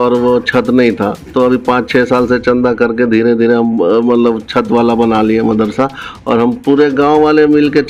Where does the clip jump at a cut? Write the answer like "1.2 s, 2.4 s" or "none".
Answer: none